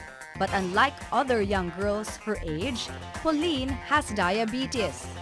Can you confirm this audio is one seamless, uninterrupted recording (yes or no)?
no